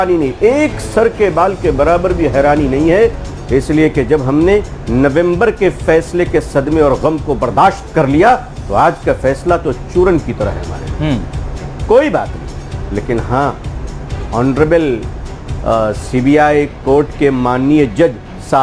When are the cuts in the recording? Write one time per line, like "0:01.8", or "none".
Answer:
none